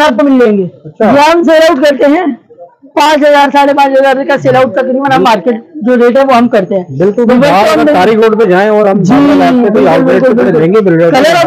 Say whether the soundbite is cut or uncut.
uncut